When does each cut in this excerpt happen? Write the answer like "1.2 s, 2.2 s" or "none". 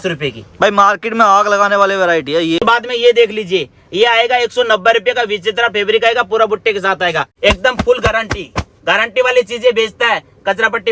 2.6 s, 7.3 s